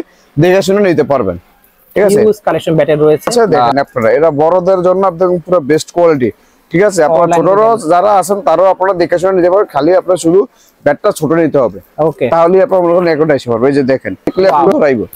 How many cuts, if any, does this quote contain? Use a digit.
2